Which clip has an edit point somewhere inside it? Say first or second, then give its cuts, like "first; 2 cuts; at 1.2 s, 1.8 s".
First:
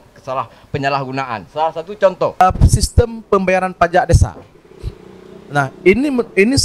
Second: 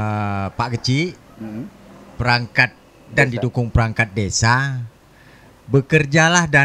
first; 1 cut; at 2.4 s